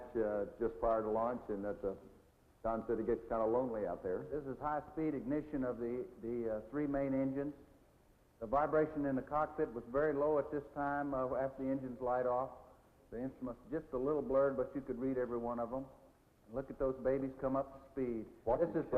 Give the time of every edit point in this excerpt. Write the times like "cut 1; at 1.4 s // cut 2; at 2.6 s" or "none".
cut 1; at 17.8 s